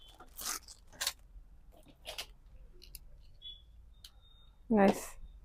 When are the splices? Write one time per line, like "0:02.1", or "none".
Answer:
none